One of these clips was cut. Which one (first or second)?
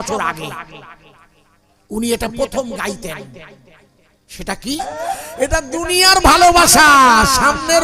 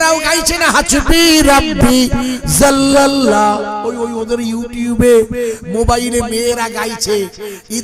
first